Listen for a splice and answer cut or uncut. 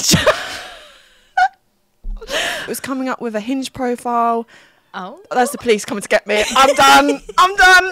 cut